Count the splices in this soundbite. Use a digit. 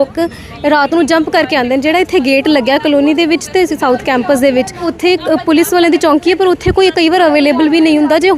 1